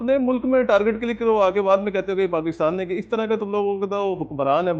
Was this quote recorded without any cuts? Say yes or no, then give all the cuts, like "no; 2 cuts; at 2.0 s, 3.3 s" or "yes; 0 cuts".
yes; 0 cuts